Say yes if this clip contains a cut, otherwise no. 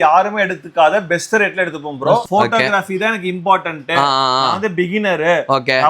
yes